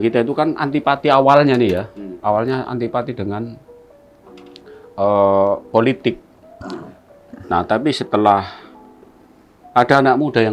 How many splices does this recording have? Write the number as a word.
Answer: zero